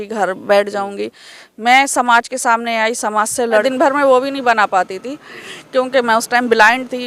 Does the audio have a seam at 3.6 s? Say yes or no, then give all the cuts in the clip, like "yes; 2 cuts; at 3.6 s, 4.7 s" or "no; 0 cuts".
yes; 1 cut; at 3.6 s